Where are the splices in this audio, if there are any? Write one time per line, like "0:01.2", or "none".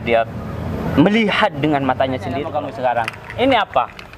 0:02.5